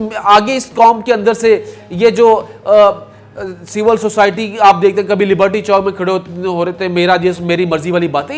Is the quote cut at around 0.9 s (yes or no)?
no